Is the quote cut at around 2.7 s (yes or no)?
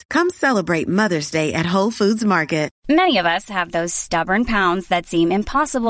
yes